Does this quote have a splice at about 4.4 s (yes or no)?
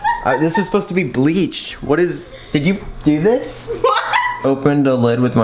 yes